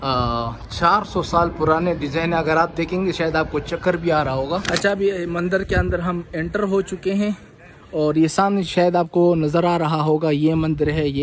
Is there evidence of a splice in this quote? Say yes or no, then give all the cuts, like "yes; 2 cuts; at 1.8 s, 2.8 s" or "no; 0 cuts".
yes; 1 cut; at 4.7 s